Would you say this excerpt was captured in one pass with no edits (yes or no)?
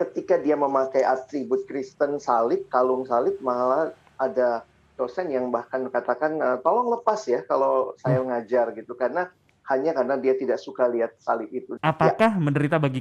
no